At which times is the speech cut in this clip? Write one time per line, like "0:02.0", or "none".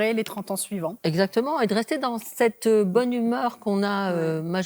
0:01.0